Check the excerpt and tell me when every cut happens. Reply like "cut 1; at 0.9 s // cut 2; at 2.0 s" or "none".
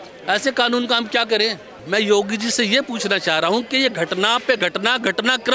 cut 1; at 1.8 s